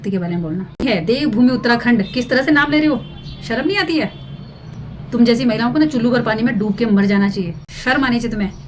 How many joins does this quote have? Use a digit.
2